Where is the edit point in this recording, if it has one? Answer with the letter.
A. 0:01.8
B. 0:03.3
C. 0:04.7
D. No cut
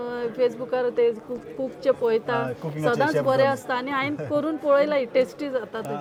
D